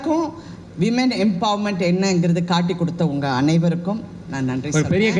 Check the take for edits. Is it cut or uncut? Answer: uncut